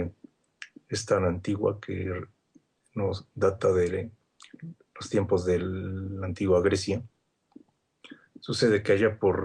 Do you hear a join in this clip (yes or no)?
no